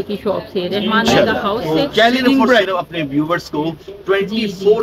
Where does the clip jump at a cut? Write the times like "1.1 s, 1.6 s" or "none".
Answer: 2.7 s

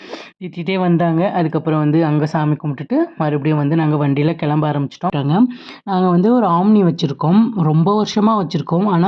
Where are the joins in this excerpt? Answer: 5.2 s

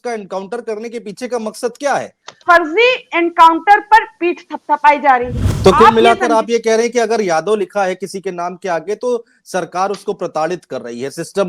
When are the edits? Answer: 2.3 s, 5.4 s

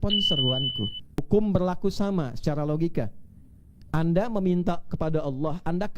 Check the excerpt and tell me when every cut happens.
1.2 s

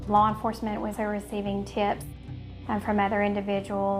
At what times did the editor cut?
0.9 s

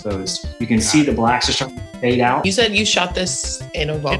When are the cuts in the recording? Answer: 2.4 s

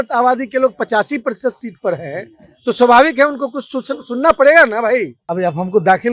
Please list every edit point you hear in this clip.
5.2 s

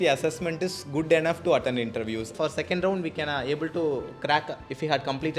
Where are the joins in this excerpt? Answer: 2.3 s

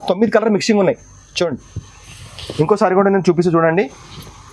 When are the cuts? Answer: none

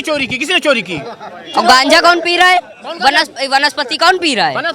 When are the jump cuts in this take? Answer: none

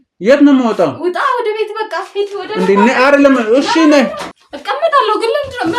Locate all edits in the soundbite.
4.3 s

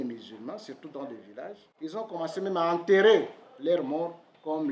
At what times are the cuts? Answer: 1.7 s

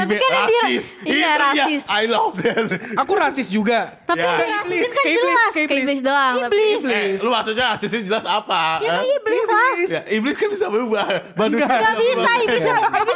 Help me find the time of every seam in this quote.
none

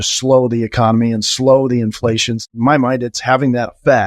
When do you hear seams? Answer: 2.4 s

